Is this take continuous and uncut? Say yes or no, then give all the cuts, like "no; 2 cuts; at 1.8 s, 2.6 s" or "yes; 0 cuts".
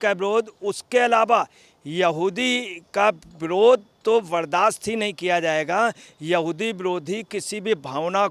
yes; 0 cuts